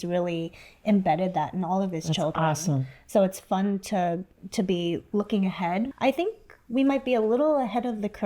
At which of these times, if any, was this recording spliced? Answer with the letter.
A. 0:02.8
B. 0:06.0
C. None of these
B